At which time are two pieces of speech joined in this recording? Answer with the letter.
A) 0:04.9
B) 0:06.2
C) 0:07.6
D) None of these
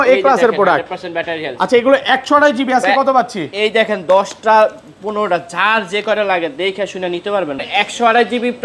C